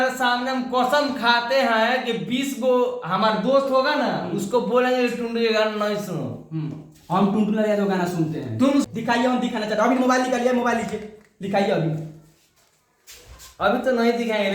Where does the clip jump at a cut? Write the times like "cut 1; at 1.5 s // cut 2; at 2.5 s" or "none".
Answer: cut 1; at 8.9 s